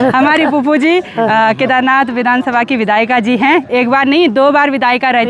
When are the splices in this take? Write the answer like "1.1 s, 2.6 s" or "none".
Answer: none